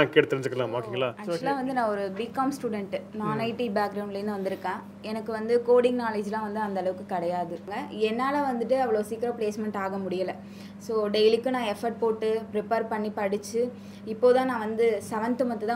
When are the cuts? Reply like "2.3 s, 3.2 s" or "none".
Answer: 1.2 s, 7.6 s